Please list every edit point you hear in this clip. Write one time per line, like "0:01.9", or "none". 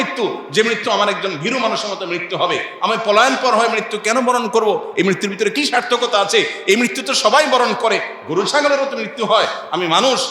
none